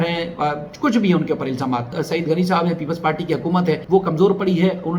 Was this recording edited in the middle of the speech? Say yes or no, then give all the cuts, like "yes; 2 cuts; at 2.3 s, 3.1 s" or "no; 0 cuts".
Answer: yes; 2 cuts; at 2.0 s, 3.8 s